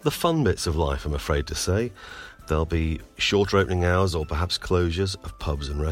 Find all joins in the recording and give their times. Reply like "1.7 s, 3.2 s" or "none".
none